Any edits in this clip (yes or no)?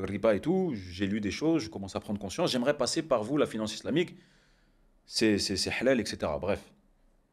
no